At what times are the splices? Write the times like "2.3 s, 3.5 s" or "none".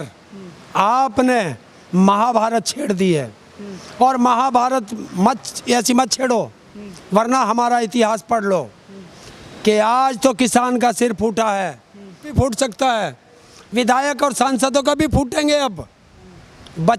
none